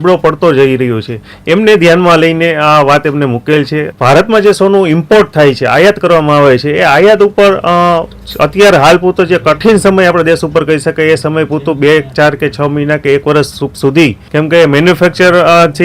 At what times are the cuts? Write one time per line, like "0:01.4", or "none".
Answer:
0:03.9
0:14.2